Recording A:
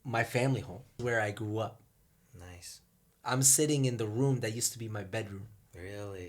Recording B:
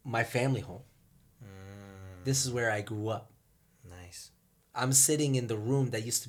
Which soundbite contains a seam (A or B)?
A